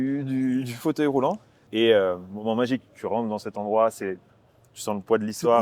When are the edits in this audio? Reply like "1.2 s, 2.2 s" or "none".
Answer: 1.7 s